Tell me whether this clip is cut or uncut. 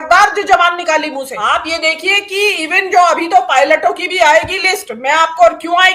uncut